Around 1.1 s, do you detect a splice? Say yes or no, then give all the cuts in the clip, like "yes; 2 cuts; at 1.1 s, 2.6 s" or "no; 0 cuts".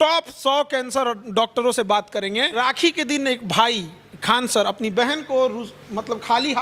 no; 1 cut; at 2.6 s